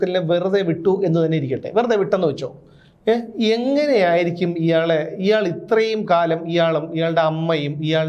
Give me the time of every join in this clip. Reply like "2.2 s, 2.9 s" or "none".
none